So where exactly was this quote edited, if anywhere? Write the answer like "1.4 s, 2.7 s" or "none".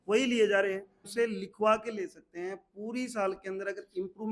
1.1 s